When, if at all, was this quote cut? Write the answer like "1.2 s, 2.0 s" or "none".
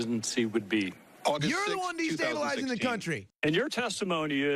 3.3 s